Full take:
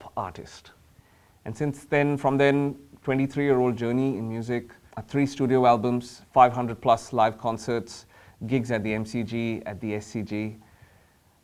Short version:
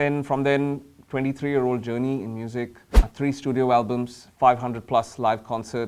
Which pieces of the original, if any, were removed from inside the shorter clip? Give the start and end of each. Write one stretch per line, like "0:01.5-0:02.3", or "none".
none